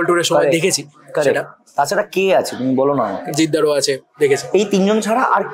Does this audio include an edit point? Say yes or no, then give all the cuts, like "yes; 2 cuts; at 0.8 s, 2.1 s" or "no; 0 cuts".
no; 0 cuts